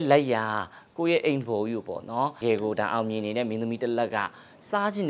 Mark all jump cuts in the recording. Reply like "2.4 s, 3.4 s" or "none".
2.4 s